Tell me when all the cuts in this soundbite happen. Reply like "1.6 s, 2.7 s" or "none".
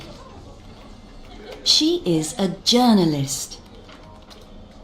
3.1 s